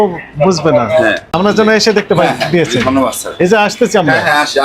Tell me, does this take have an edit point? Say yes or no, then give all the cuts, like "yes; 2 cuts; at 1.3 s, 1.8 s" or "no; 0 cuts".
yes; 1 cut; at 1.3 s